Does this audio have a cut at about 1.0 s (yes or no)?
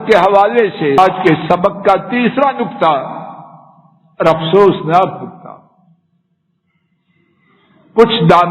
yes